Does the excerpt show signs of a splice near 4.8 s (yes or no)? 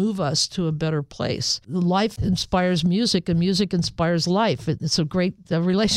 no